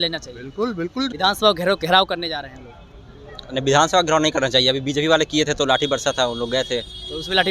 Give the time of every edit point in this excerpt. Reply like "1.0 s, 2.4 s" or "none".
1.1 s